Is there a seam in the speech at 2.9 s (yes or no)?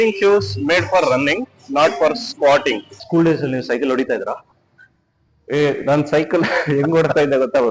yes